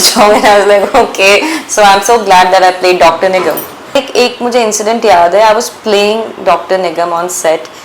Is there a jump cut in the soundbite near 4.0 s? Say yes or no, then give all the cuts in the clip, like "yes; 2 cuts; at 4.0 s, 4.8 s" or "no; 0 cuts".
yes; 1 cut; at 4.0 s